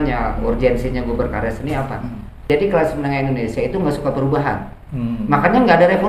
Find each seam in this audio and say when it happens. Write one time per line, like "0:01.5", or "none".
0:02.4